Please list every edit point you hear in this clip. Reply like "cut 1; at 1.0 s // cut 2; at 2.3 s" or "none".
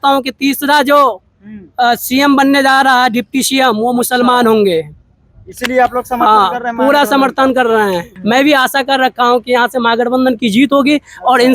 cut 1; at 8.1 s